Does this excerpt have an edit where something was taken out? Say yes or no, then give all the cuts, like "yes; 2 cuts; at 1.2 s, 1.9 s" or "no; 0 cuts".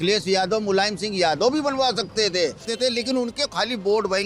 yes; 1 cut; at 2.6 s